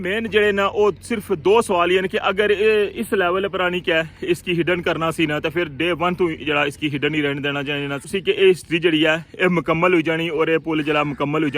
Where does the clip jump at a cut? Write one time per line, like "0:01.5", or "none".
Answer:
0:08.1